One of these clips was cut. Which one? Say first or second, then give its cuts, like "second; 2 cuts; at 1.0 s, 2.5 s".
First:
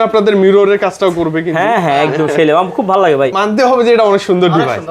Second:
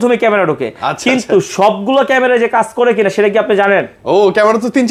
first; 1 cut; at 3.3 s